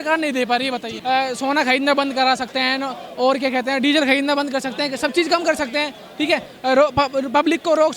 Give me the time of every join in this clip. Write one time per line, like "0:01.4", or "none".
0:00.9